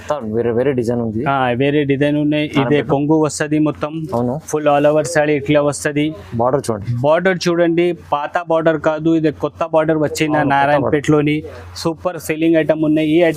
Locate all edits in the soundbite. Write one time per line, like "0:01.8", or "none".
none